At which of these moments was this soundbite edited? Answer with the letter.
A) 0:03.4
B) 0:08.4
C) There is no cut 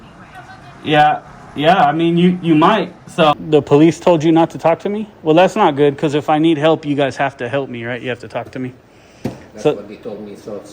A